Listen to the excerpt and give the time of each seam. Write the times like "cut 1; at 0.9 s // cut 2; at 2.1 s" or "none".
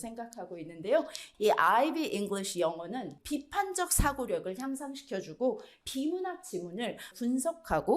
cut 1; at 1.2 s // cut 2; at 3.1 s // cut 3; at 5.7 s // cut 4; at 7.1 s